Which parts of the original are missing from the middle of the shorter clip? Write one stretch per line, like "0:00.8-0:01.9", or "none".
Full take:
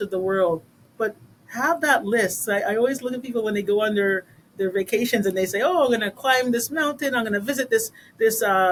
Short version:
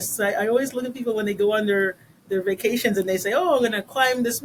none